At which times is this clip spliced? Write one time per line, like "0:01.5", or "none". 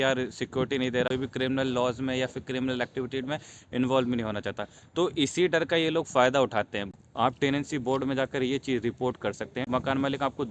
0:01.1
0:06.8
0:09.7